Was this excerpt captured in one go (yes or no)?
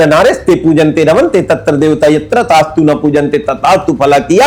yes